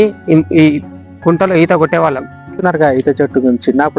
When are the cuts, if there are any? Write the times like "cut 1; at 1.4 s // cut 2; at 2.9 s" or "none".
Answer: cut 1; at 2.6 s

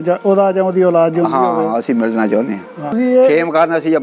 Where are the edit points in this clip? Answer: cut 1; at 2.9 s

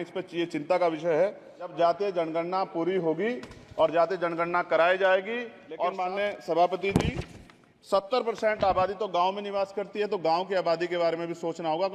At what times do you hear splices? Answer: cut 1; at 1.7 s // cut 2; at 5.9 s

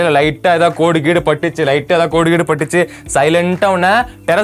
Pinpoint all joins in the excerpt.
none

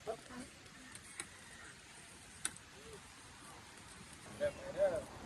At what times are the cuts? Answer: cut 1; at 4.3 s

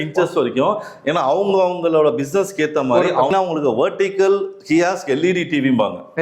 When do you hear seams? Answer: cut 1; at 3.3 s

